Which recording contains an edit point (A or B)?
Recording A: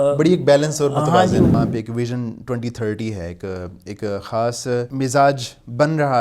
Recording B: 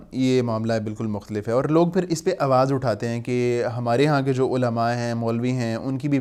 A